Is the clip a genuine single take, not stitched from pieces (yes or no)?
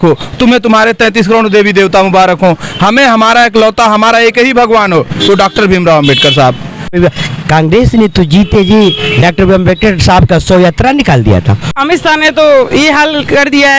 no